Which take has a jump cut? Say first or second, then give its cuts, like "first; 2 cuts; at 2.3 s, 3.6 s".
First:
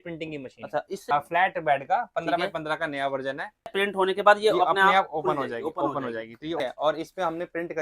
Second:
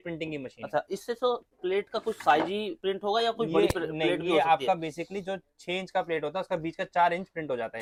first; 3 cuts; at 1.0 s, 3.7 s, 6.6 s